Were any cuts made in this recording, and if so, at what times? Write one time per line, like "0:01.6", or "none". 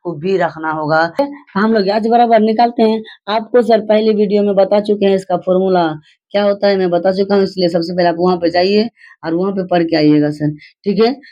0:01.2